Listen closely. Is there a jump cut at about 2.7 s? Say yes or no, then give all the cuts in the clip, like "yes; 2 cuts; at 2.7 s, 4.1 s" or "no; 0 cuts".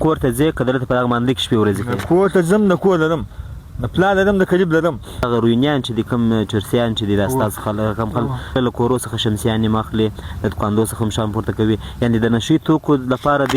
no; 2 cuts; at 5.2 s, 8.6 s